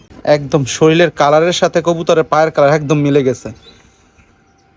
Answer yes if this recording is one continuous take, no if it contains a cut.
yes